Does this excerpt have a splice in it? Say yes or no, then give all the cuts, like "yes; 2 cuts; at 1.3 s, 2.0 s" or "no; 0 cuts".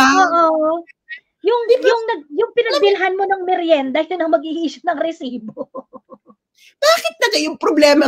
no; 0 cuts